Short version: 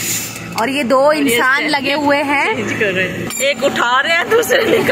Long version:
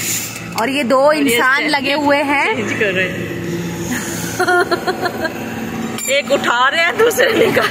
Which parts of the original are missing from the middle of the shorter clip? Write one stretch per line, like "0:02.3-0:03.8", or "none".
0:03.3-0:06.0